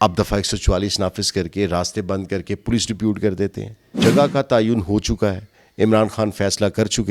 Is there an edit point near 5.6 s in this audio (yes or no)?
no